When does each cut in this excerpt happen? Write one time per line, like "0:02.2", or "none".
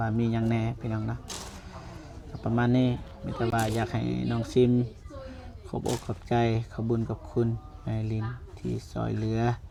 none